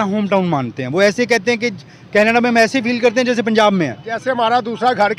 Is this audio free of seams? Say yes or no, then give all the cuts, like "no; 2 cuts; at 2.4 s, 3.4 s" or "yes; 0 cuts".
yes; 0 cuts